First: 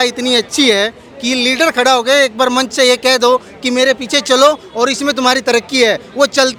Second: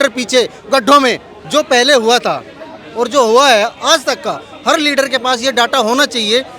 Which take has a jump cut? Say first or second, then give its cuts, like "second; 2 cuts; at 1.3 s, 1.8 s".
second; 1 cut; at 1.3 s